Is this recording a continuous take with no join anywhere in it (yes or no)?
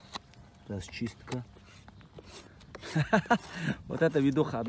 no